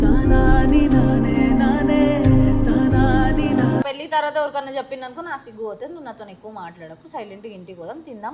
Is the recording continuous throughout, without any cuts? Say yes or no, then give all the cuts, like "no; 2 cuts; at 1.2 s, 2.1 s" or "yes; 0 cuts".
yes; 0 cuts